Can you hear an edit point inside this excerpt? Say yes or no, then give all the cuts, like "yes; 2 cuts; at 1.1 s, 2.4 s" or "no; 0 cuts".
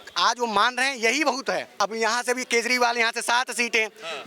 yes; 1 cut; at 1.7 s